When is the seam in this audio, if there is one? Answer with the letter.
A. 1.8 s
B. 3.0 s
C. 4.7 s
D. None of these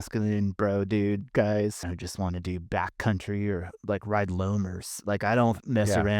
A